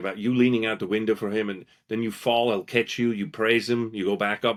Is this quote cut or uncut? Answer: uncut